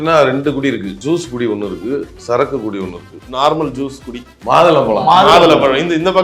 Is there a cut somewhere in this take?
yes; 4 cuts; at 0.9 s, 2.1 s, 3.2 s, 4.3 s

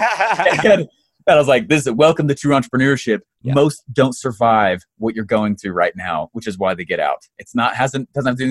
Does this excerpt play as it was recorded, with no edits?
yes; 0 cuts

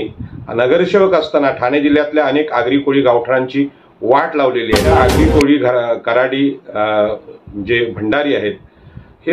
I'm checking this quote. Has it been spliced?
yes; 1 cut; at 4.9 s

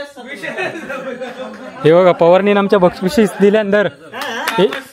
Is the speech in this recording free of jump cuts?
yes; 0 cuts

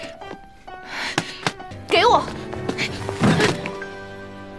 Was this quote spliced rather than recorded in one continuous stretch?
yes; 1 cut; at 1.7 s

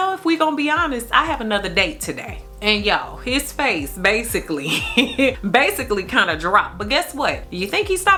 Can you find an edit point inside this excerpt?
no; 0 cuts

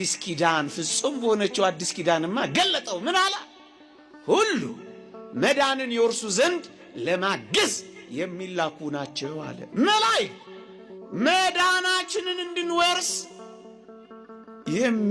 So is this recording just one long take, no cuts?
yes; 0 cuts

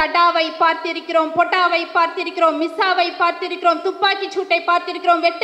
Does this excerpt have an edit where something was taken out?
no; 0 cuts

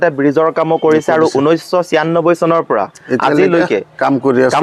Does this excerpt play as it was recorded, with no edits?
yes; 0 cuts

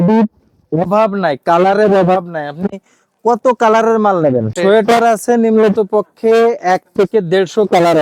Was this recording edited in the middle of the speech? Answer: yes; 1 cut; at 4.5 s

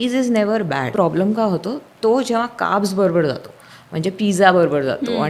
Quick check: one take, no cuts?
no; 1 cut; at 0.9 s

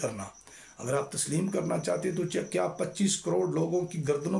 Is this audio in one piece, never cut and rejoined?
yes; 0 cuts

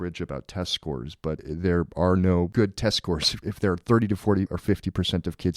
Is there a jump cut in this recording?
yes; 4 cuts; at 1.4 s, 2.5 s, 3.3 s, 4.6 s

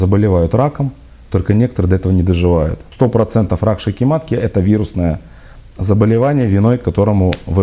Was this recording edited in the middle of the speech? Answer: yes; 1 cut; at 2.8 s

